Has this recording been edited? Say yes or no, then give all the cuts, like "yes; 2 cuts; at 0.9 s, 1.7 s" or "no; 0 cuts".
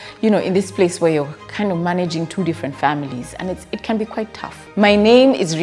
yes; 1 cut; at 4.6 s